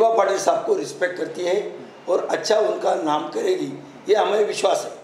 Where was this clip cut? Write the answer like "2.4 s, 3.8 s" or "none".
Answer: none